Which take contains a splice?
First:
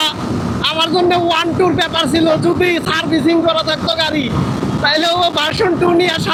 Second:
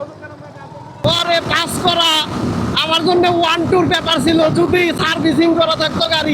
second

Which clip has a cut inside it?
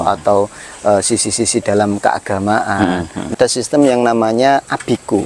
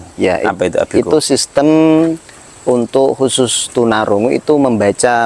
first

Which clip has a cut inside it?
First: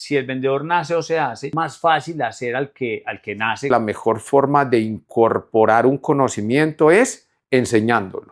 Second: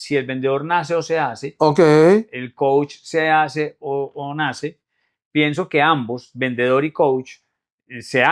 first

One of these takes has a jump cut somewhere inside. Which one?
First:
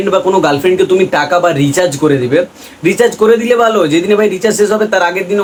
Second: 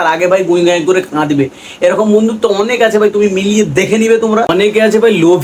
second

